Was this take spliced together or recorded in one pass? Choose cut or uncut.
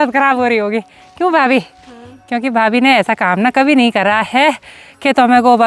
uncut